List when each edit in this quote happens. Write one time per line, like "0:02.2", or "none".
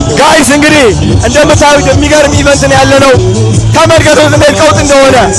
none